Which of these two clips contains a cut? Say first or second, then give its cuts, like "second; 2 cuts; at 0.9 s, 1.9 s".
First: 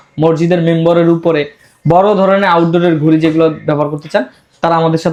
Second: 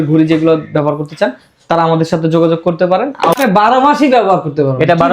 second; 1 cut; at 3.4 s